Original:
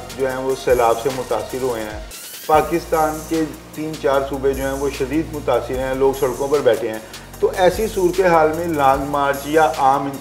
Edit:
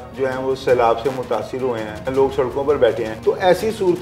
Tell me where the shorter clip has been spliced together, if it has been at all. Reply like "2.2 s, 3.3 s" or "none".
2.1 s, 3.1 s